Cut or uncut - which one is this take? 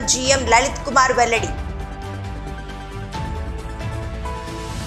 uncut